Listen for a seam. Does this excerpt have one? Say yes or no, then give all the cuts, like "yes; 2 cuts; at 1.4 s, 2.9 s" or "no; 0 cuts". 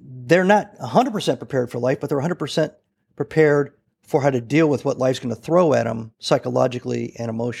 no; 0 cuts